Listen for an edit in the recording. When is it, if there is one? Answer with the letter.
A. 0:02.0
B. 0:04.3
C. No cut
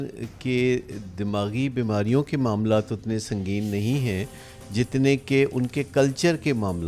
C